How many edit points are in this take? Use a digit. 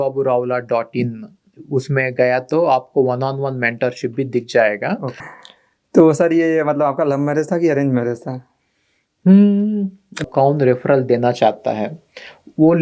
2